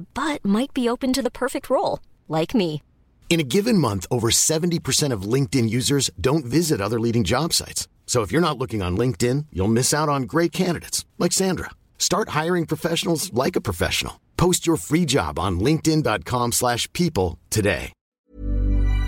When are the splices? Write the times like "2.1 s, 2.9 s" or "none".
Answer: 18.1 s